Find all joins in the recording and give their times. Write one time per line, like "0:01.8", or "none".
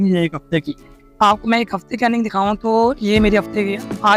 none